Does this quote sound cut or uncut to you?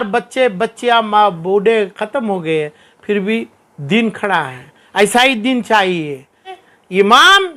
cut